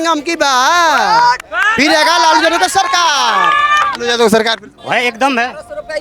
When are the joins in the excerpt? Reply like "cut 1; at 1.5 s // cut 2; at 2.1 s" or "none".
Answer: cut 1; at 4.7 s